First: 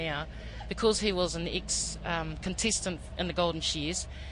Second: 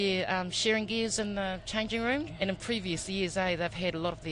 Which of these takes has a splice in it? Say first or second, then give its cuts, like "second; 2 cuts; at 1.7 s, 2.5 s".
second; 1 cut; at 2.3 s